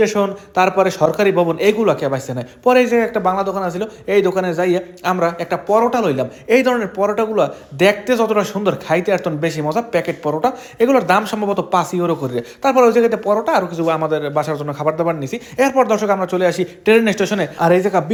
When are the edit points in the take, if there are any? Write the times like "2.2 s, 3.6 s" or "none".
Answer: none